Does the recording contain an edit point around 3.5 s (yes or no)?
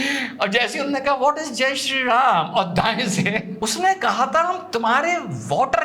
yes